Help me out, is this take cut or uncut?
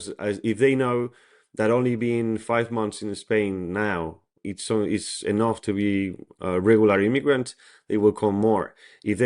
cut